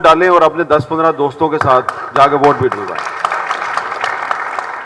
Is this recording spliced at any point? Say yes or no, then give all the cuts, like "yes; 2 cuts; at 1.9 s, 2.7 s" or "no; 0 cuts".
no; 0 cuts